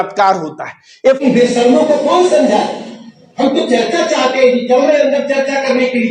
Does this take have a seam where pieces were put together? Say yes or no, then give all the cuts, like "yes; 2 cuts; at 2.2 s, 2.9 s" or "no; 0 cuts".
yes; 1 cut; at 1.2 s